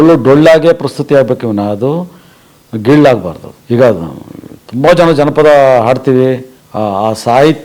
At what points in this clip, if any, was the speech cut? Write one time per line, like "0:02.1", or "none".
0:03.5
0:06.5